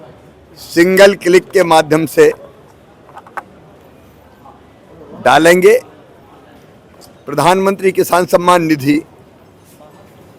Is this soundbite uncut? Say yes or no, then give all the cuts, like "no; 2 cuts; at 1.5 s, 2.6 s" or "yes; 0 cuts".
yes; 0 cuts